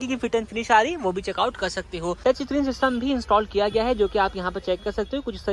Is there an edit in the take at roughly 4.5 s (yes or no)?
no